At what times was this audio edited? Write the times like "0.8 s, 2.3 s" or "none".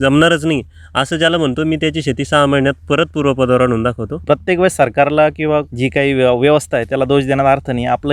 4.2 s, 5.7 s